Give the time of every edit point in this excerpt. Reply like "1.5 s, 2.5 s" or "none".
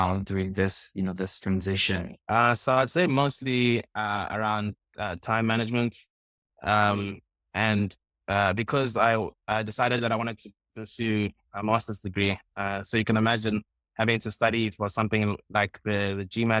2.1 s